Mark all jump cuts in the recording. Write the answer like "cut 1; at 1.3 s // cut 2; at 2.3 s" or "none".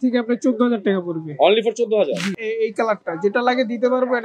cut 1; at 2.4 s